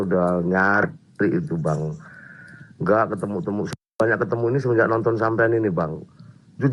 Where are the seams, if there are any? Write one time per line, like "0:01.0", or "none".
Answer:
none